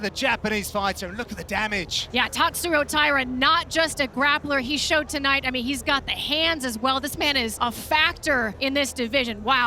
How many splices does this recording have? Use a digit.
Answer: 3